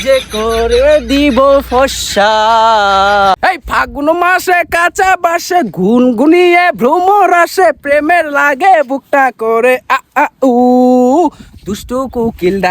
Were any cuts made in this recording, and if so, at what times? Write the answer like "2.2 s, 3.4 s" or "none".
3.4 s